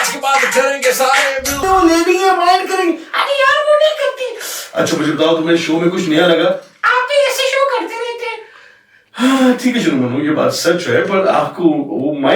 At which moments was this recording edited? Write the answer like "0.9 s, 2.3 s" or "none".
1.6 s